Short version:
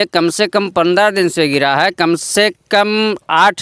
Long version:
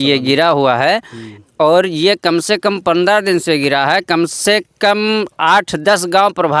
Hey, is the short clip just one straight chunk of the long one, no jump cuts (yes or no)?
yes